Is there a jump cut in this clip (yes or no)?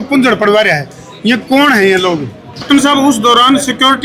yes